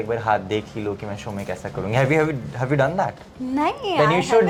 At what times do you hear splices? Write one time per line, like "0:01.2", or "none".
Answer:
none